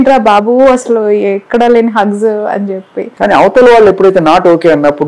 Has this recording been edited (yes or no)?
yes